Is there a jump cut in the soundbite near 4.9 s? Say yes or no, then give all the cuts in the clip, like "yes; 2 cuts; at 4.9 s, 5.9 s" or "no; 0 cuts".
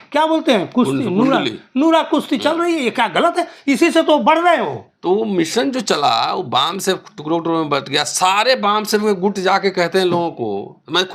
yes; 1 cut; at 4.9 s